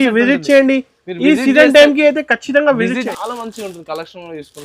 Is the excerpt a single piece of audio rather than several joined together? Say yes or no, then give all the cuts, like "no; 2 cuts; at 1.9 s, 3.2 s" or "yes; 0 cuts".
no; 1 cut; at 3.1 s